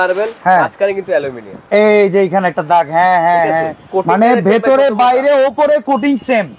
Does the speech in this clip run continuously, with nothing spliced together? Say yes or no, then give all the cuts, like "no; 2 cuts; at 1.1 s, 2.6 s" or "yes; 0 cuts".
no; 1 cut; at 3.9 s